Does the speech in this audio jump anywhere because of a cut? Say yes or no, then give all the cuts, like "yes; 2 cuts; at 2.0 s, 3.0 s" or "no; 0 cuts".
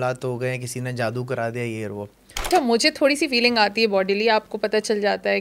yes; 1 cut; at 2.5 s